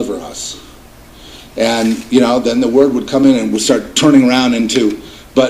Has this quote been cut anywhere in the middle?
no; 0 cuts

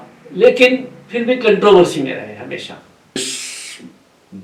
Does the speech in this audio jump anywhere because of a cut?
yes; 1 cut; at 3.2 s

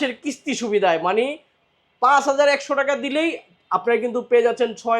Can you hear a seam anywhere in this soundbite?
no; 0 cuts

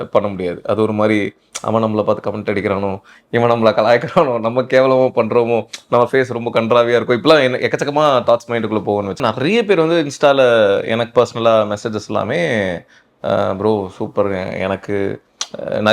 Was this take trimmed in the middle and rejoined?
yes; 1 cut; at 9.2 s

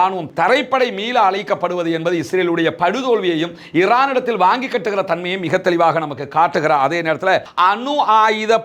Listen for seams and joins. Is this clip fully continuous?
no; 1 cut; at 7.5 s

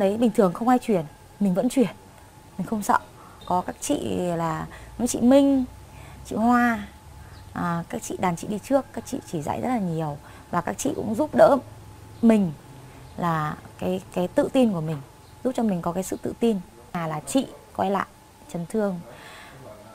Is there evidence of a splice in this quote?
yes; 2 cuts; at 3.4 s, 17.0 s

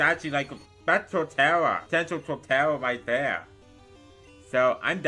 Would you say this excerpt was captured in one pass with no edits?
no; 1 cut; at 1.8 s

